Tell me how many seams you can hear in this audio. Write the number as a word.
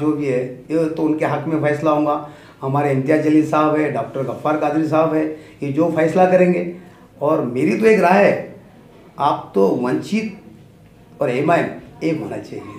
zero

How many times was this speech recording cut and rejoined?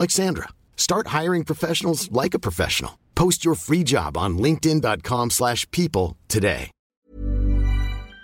one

